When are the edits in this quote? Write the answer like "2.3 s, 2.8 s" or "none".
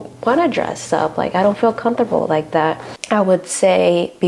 2.9 s